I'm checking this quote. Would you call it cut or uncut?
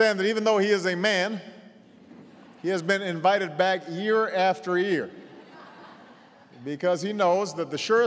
uncut